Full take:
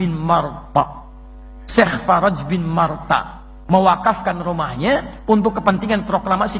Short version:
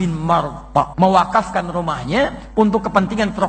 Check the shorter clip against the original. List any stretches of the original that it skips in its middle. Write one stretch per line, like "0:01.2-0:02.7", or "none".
0:00.9-0:03.6